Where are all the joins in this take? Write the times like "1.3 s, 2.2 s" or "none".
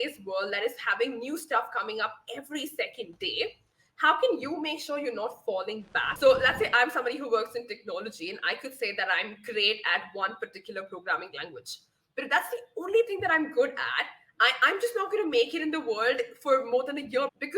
6.0 s